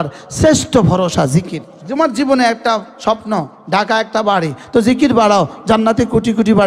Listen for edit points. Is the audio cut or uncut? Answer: cut